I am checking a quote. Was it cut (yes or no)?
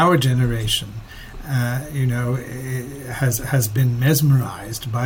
no